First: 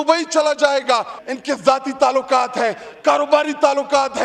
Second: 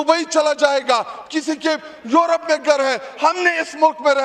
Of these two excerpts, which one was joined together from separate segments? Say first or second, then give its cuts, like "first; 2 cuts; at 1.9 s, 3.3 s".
first; 1 cut; at 1.2 s